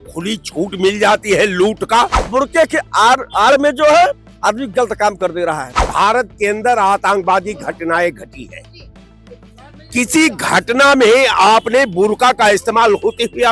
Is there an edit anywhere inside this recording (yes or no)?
yes